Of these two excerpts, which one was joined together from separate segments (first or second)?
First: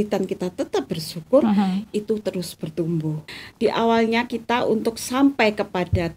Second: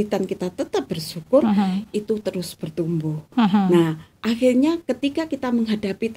first